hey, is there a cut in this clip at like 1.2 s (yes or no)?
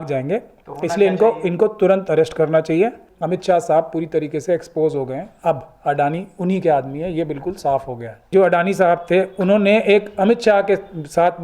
no